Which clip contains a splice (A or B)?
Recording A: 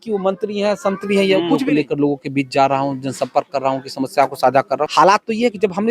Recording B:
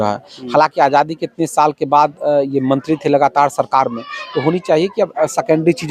A